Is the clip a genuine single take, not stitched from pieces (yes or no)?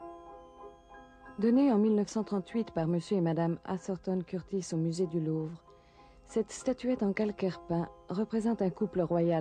yes